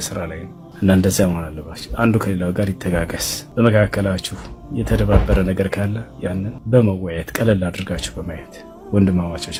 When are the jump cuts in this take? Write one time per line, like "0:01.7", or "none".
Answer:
none